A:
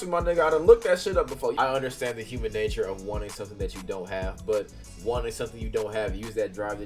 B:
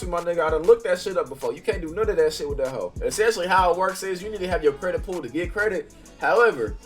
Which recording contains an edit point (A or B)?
A